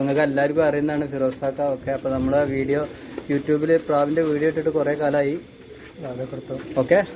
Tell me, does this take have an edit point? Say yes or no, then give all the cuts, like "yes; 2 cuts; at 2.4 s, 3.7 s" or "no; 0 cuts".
no; 0 cuts